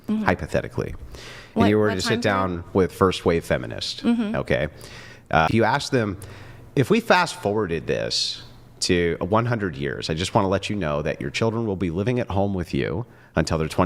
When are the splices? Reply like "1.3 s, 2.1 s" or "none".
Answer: 5.5 s